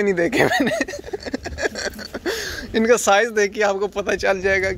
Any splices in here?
no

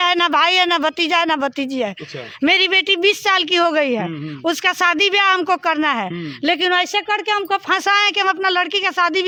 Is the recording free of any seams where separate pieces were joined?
yes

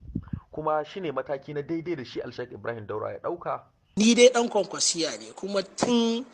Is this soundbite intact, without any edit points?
no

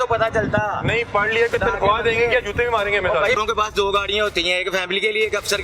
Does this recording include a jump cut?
yes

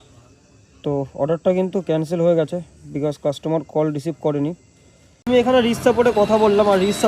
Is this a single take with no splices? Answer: no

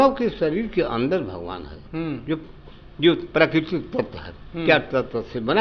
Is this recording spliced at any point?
no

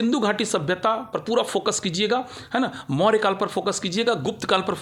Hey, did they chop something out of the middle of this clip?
no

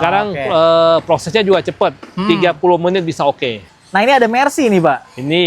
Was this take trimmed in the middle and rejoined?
yes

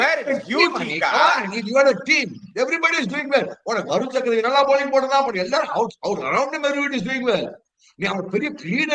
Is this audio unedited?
yes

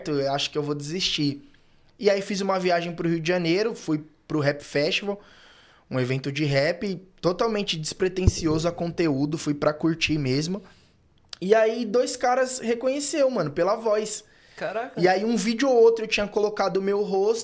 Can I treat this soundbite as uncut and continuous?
yes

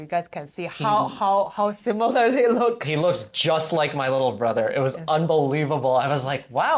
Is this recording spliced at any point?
no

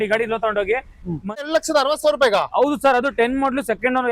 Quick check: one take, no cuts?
no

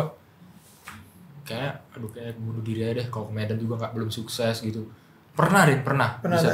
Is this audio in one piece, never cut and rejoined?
yes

